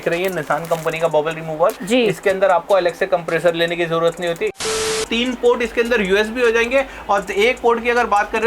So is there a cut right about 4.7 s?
yes; 1 cut; at 4.7 s

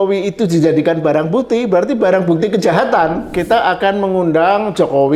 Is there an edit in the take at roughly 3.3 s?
yes; 1 cut; at 3.3 s

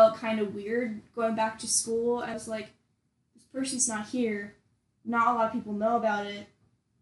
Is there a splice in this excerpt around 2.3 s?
yes; 1 cut; at 2.3 s

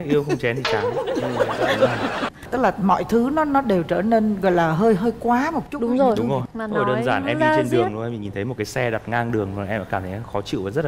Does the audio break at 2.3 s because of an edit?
yes; 1 cut; at 2.3 s

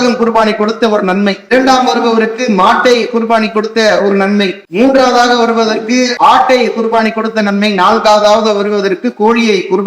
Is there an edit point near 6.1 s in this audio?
yes; 3 cuts; at 1.5 s, 4.6 s, 6.1 s

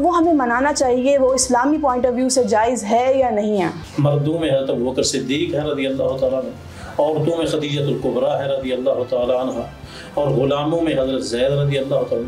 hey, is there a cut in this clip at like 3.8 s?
yes; 1 cut; at 3.8 s

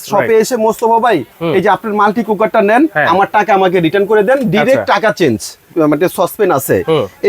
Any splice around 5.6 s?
yes; 1 cut; at 5.6 s

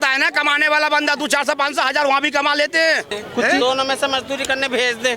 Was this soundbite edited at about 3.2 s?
yes; 1 cut; at 3.2 s

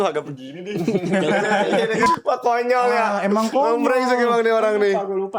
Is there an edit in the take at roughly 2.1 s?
yes; 1 cut; at 2.1 s

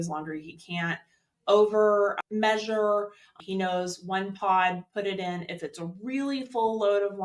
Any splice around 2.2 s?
yes; 2 cuts; at 2.2 s, 3.3 s

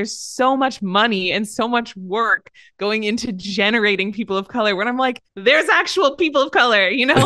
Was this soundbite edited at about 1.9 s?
no; 1 cut; at 5.3 s

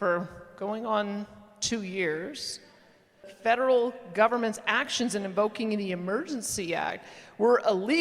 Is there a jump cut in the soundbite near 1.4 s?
no; 1 cut; at 3.2 s

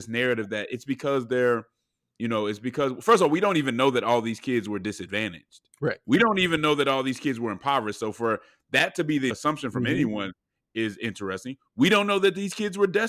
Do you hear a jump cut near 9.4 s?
yes; 1 cut; at 9.4 s

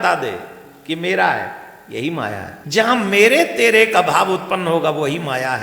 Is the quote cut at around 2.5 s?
yes; 1 cut; at 2.5 s

